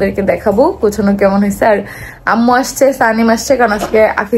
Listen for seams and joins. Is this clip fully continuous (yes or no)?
yes